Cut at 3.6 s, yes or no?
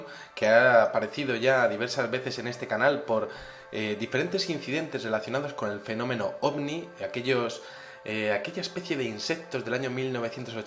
yes